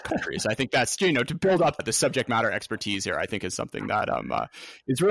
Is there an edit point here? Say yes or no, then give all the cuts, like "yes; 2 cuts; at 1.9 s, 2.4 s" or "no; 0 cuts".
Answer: yes; 1 cut; at 1.8 s